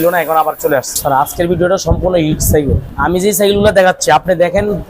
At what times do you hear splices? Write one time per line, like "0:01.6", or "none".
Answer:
0:01.0
0:02.9